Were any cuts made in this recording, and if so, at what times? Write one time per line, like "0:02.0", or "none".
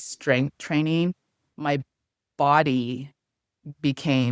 none